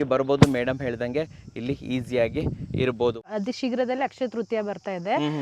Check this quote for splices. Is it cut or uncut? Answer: cut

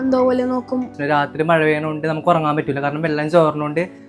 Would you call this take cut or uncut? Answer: cut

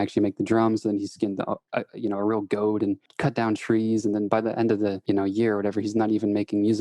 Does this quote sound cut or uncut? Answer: cut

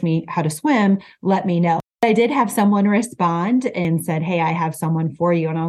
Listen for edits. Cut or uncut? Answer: cut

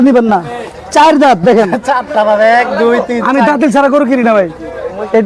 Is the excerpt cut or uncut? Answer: uncut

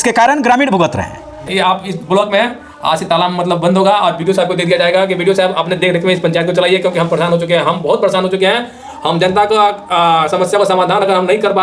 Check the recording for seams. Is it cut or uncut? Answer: cut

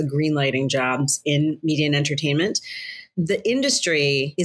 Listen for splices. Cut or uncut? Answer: uncut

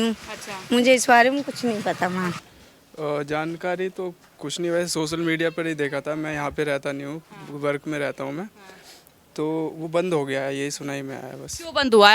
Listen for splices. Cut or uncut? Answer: cut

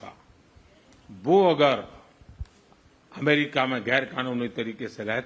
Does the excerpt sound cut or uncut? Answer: uncut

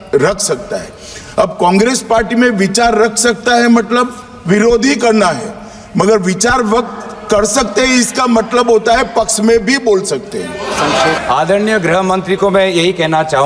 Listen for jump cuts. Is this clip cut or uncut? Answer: cut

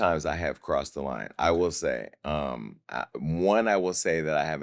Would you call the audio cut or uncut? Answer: uncut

